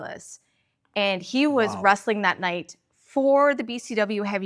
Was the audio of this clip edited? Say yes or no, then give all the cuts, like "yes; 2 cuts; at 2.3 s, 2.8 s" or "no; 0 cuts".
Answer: no; 0 cuts